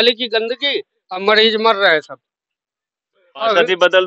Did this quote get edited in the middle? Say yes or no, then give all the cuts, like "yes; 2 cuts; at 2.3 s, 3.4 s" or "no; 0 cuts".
no; 0 cuts